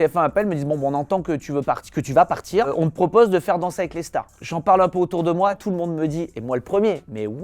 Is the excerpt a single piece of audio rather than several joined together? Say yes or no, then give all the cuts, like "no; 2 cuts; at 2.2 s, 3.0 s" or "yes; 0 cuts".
yes; 0 cuts